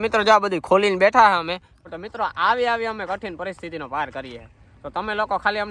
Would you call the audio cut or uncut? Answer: cut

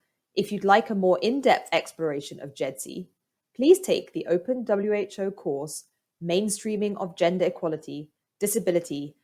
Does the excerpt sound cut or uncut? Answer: cut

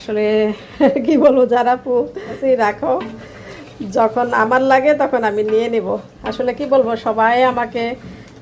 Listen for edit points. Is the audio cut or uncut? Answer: cut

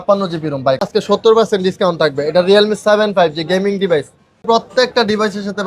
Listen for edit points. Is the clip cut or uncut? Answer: cut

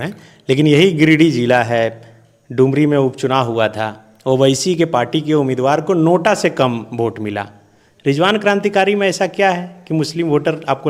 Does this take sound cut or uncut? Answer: uncut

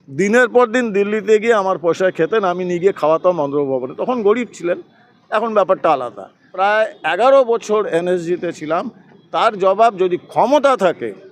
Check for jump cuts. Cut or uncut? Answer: cut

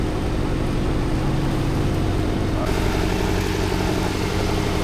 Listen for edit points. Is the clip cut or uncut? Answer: cut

